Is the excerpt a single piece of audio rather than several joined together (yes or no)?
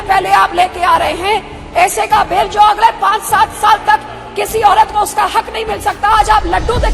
yes